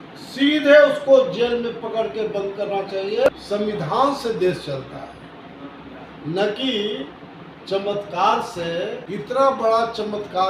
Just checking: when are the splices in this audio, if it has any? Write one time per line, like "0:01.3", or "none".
0:03.3
0:09.0

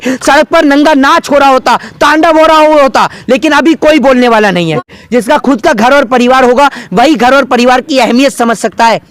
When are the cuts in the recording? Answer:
0:05.0

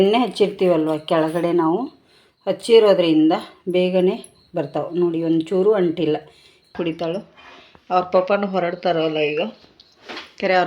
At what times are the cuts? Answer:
0:06.7

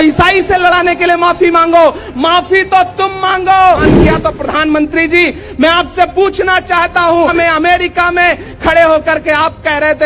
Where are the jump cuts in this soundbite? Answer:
0:03.8
0:07.3

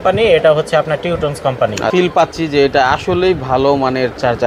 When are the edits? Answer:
0:01.9

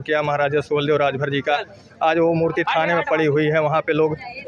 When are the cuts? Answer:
none

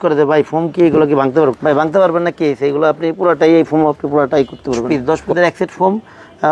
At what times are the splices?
0:01.6
0:04.8

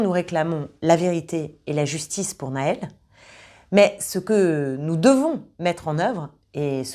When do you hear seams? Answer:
none

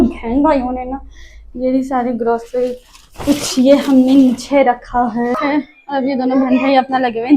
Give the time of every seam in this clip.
0:05.4

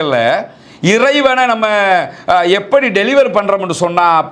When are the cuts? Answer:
none

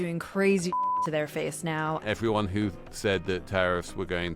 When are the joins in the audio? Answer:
0:02.0

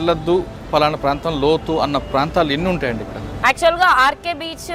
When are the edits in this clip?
0:03.2

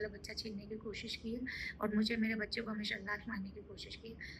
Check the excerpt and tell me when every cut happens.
none

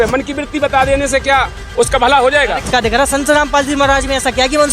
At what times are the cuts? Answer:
0:02.7

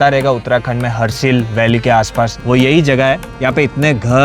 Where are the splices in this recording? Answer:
0:02.4

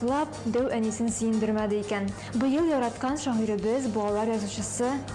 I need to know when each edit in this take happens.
0:02.2

